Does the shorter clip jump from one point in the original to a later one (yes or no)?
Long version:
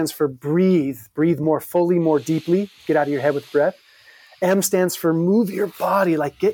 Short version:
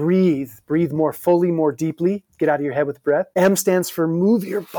yes